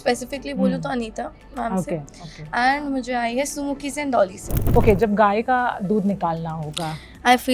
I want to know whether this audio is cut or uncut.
cut